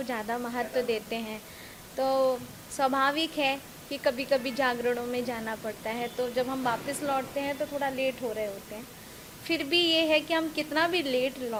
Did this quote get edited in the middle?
no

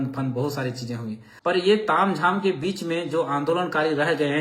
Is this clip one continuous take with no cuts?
no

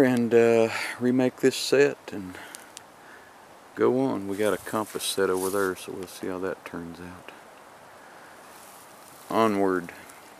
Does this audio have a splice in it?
no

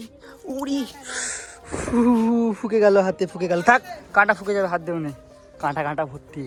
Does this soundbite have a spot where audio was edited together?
no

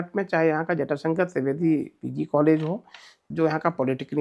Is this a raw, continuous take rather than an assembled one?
no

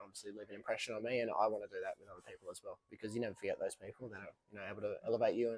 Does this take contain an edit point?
no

